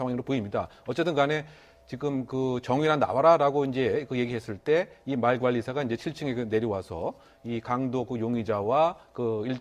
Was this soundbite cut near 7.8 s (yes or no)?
yes